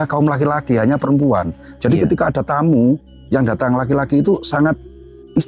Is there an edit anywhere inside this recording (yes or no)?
no